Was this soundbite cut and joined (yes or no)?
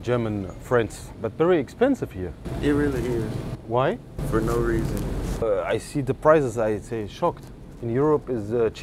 no